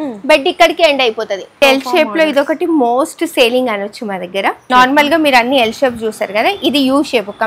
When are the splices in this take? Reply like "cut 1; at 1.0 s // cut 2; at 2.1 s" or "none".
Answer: cut 1; at 1.6 s // cut 2; at 4.6 s